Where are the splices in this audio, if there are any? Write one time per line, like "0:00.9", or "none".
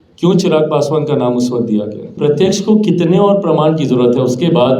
0:02.1